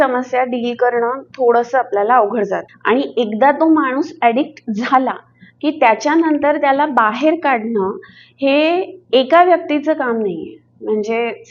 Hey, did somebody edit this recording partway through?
yes; 1 cut; at 2.7 s

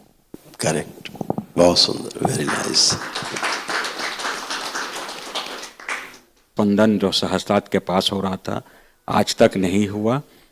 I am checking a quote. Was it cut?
yes; 1 cut; at 6.5 s

